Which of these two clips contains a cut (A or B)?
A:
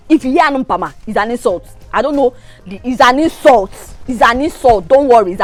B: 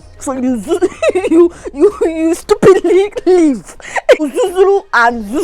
B